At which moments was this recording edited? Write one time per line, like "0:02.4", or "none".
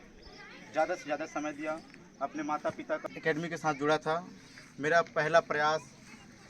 0:03.0